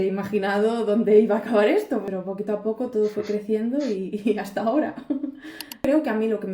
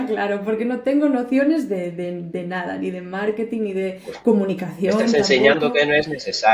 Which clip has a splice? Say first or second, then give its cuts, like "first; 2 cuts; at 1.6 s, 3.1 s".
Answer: first; 2 cuts; at 2.0 s, 5.9 s